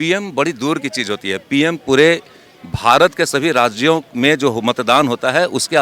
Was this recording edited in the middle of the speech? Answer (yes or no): no